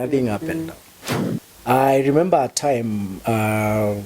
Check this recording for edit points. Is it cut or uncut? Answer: cut